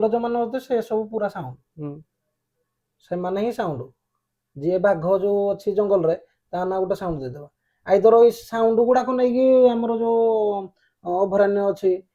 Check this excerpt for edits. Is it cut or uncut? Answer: uncut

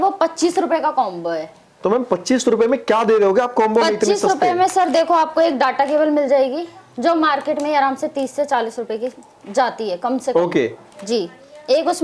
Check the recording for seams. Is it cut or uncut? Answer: uncut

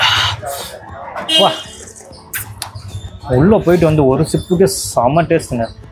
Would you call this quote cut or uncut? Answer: uncut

